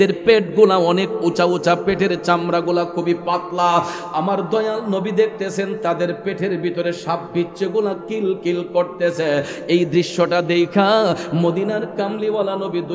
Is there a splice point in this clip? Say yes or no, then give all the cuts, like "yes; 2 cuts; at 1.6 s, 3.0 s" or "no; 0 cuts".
no; 0 cuts